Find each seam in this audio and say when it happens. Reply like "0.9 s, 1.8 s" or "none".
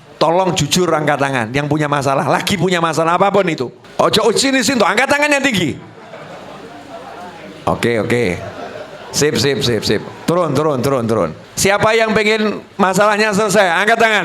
3.8 s, 11.4 s